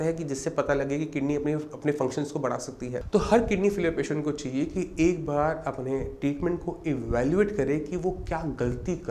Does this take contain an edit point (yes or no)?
yes